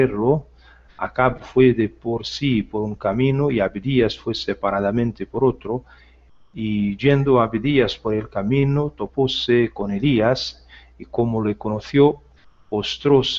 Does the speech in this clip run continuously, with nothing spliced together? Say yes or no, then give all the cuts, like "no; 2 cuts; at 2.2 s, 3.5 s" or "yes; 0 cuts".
yes; 0 cuts